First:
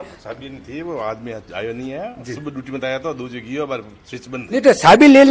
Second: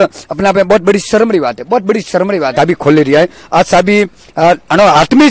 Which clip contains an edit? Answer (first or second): second